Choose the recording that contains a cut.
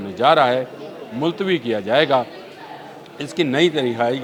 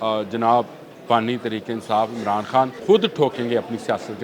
second; 1 cut; at 2.8 s

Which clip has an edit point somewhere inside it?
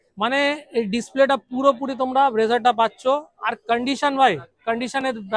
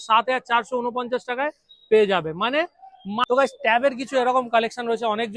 second; 1 cut; at 3.2 s

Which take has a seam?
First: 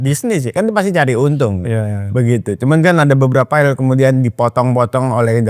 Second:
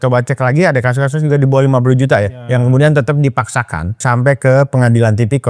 second; 1 cut; at 4.0 s

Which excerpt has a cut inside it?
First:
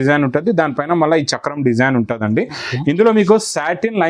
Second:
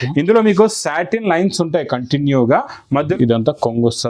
second; 1 cut; at 3.0 s

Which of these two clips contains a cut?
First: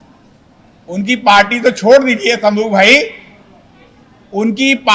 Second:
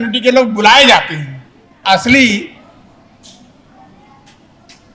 second; 1 cut; at 1.8 s

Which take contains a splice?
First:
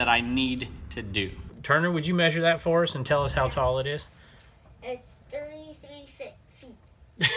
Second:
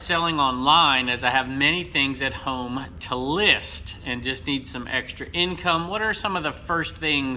first; 1 cut; at 1.6 s

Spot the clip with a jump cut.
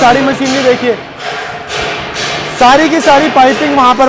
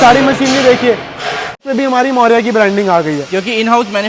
second; 1 cut; at 1.6 s

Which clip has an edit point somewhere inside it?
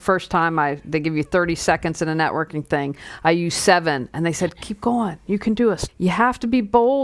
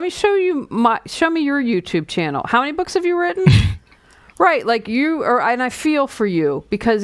first; 1 cut; at 5.9 s

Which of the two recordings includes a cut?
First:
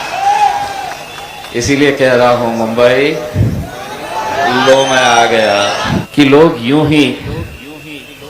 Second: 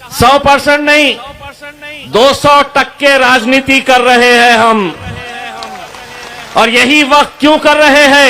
first; 1 cut; at 5.9 s

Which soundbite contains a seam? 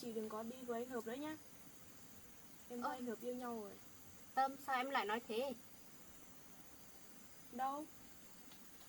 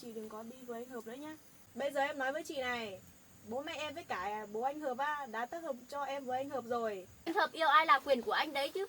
second; 2 cuts; at 1.5 s, 7.2 s

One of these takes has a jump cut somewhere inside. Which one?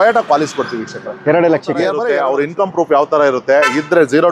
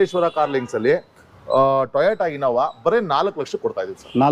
first; 1 cut; at 2.0 s

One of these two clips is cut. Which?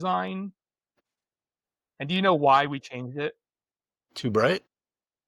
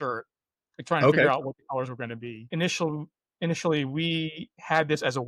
second; 1 cut; at 2.4 s

